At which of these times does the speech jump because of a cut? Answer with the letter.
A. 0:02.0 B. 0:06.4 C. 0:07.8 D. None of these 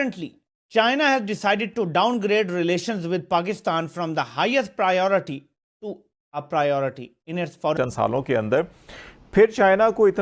C